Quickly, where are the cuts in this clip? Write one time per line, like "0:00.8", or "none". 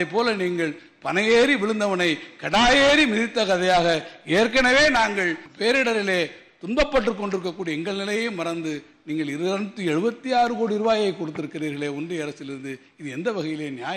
0:05.4

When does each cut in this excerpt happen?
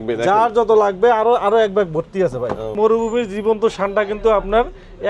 0:02.7

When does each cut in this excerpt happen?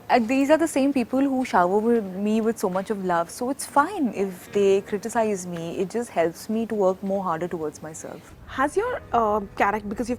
none

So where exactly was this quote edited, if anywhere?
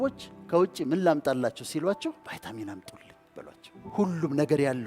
0:02.2
0:03.9

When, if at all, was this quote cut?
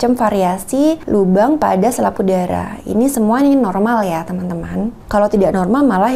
0:01.0
0:05.0

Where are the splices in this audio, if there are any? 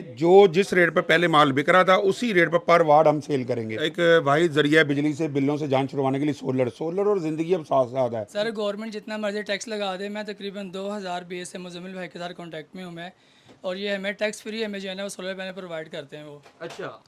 0:03.8
0:08.3

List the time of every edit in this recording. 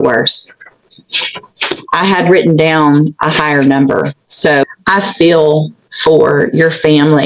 0:04.6

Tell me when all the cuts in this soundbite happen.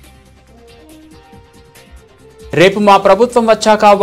none

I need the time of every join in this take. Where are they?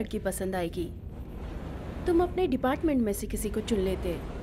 0:01.8

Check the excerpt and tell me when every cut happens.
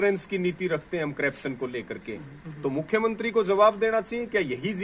none

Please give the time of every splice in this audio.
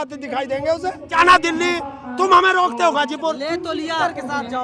0:01.1
0:03.9

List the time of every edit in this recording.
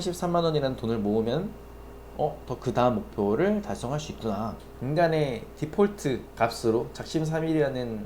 0:04.7

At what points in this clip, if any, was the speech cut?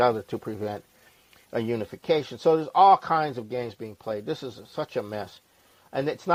none

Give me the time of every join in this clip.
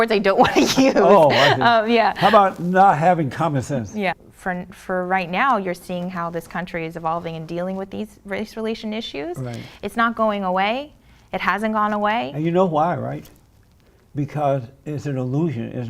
0:04.2

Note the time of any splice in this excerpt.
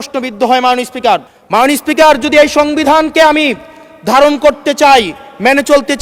none

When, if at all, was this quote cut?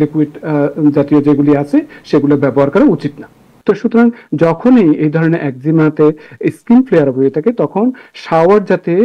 0:03.5

